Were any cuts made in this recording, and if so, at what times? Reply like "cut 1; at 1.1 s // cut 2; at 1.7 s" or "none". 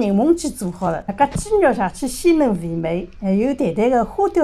cut 1; at 1.1 s